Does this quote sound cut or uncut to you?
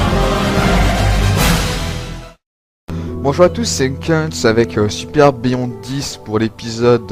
uncut